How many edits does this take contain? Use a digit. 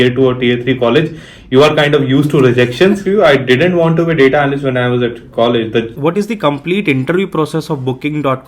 2